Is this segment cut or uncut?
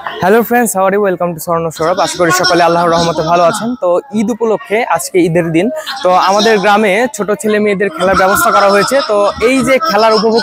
uncut